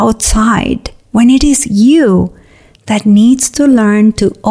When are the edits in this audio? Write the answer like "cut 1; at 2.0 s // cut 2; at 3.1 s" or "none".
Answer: cut 1; at 0.9 s